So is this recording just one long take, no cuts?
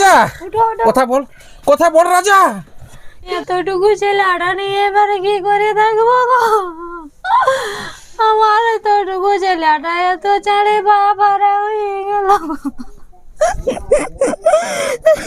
no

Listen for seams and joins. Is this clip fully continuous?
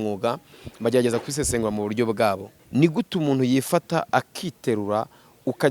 no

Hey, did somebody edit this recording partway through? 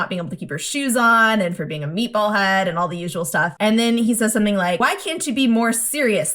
yes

